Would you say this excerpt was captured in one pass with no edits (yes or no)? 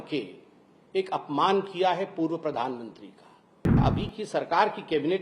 no